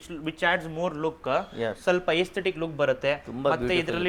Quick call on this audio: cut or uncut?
uncut